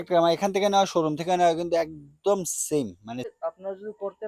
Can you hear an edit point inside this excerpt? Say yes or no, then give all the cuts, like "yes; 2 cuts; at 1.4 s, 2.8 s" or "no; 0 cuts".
yes; 1 cut; at 3.3 s